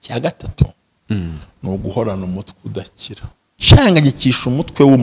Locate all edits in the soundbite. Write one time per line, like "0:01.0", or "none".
0:03.6